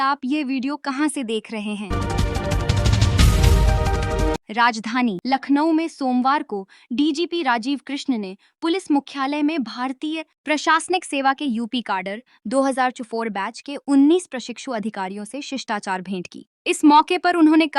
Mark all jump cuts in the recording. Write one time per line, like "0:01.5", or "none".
0:01.9
0:04.4

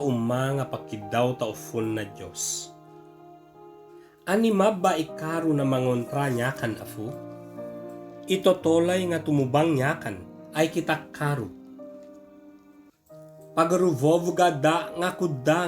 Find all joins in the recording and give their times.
none

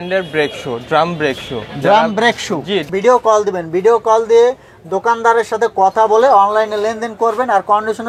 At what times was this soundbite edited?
0:02.9

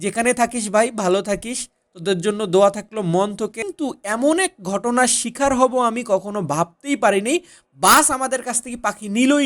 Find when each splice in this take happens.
0:03.6

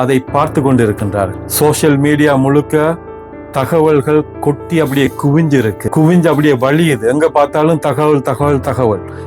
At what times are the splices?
0:01.4
0:05.8

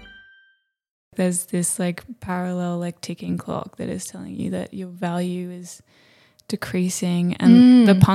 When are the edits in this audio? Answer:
0:01.1

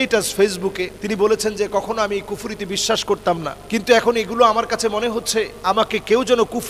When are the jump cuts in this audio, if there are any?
0:01.0
0:03.5
0:05.5

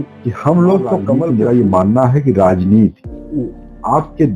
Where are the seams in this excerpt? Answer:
0:01.2

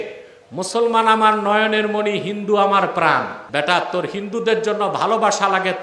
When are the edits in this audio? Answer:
0:03.4

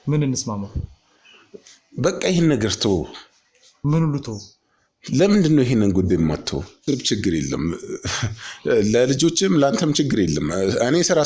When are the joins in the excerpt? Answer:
0:06.8

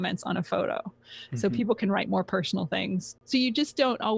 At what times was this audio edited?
0:03.1

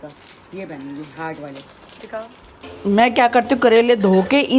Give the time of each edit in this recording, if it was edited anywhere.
0:02.7

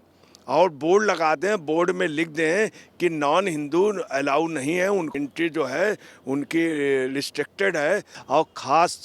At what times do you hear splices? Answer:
0:05.1
0:08.2

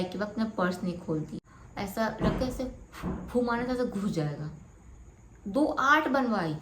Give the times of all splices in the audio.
0:01.4

